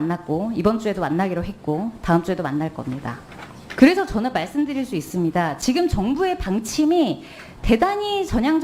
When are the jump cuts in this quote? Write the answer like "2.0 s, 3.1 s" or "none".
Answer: none